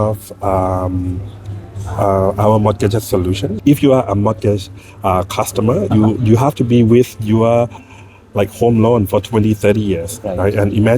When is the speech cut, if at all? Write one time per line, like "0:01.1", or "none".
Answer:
0:03.5